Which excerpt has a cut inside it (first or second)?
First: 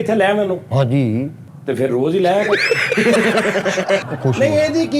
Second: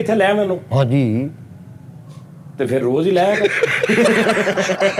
first